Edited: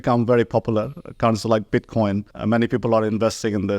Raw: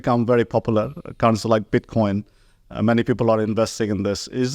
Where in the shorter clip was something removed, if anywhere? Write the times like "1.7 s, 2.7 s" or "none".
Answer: 2.3 s